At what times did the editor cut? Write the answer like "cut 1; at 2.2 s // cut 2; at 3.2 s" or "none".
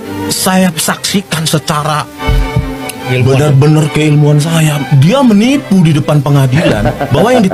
none